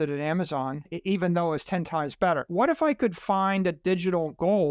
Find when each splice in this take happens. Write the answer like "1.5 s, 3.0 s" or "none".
0.9 s, 2.5 s

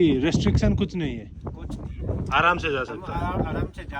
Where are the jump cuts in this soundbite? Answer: none

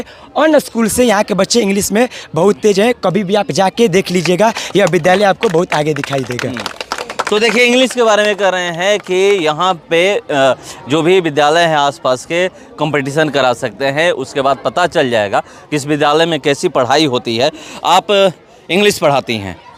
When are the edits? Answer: none

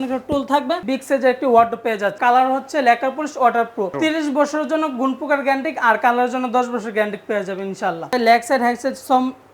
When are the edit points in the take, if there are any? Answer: 0.8 s, 2.2 s, 3.9 s, 8.1 s

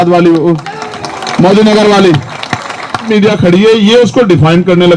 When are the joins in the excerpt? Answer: 3.1 s

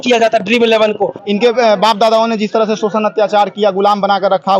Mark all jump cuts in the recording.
1.2 s

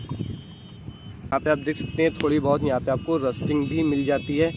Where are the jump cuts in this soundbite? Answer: 1.3 s

